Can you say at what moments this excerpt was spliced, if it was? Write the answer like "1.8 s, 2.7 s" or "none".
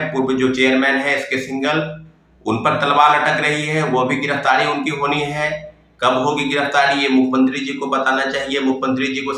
none